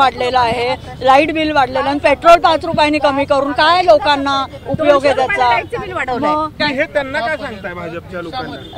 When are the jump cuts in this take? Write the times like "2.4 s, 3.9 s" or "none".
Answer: 6.6 s